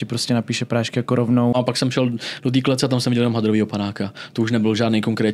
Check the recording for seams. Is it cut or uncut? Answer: cut